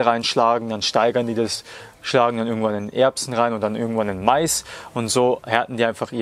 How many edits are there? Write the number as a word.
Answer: zero